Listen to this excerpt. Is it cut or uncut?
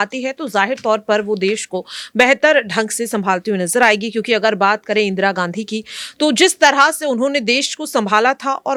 uncut